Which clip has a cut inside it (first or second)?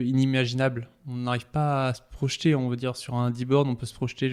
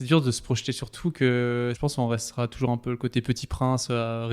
second